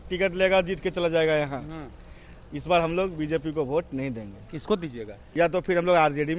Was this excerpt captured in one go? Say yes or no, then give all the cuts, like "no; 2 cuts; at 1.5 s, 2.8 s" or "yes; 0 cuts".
no; 1 cut; at 5.2 s